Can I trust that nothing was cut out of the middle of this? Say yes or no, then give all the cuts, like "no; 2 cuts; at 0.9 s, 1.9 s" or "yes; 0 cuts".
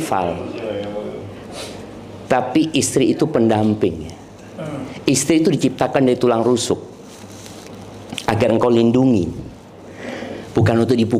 yes; 0 cuts